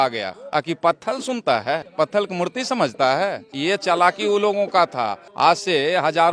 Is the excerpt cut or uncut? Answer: cut